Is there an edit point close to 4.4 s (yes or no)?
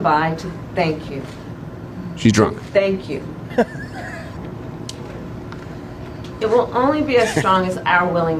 yes